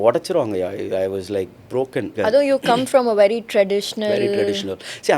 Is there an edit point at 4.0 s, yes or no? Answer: no